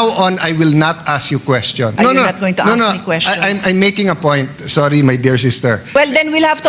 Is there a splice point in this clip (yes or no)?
yes